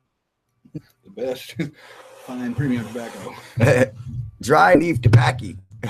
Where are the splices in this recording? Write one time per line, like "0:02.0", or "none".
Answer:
none

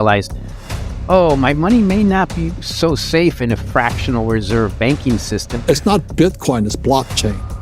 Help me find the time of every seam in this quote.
0:05.5

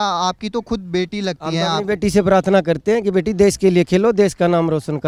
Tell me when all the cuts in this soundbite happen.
none

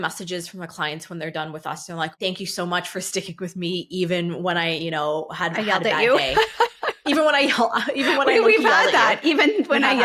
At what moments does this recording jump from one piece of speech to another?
0:02.2

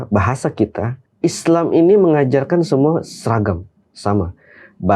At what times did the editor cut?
0:01.0

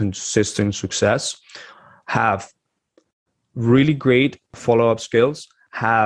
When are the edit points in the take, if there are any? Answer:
0:04.5

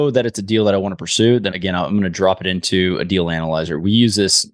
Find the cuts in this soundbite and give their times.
none

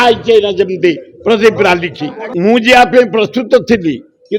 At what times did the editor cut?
0:02.2

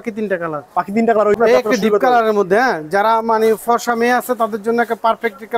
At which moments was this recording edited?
0:01.4

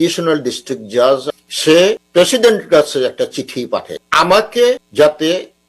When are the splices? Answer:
0:01.2
0:02.0
0:04.0
0:04.8

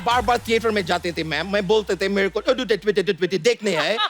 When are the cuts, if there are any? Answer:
none

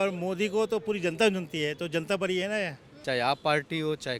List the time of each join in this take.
0:02.9

